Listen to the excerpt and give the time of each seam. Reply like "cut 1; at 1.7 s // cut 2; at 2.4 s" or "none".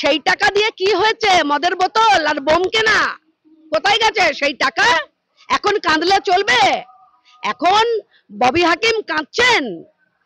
none

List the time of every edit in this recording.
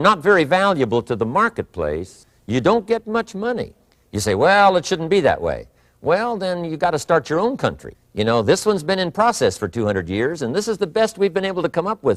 none

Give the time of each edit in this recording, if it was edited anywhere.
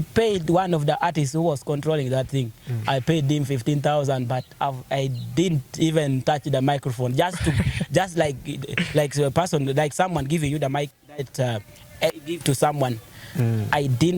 none

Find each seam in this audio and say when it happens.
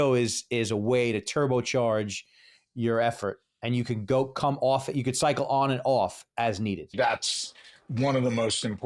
cut 1; at 6.9 s

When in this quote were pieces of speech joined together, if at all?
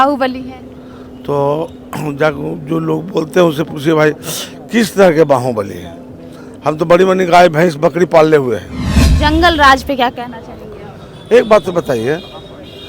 cut 1; at 9.1 s

